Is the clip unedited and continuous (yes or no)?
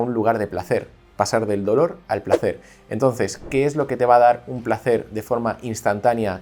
yes